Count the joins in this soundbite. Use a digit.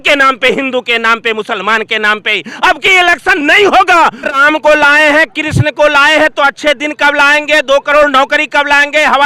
1